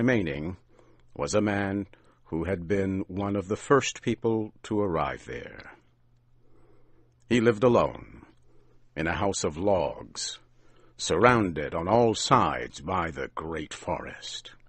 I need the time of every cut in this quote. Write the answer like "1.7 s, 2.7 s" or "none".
none